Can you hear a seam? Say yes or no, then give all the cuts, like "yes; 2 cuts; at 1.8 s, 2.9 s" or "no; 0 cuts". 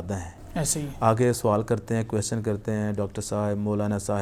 no; 0 cuts